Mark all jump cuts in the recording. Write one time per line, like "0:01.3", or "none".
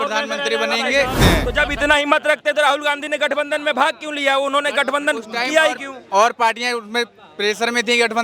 0:01.1